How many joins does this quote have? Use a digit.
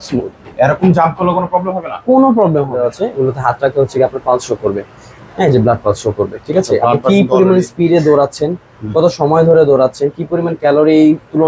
1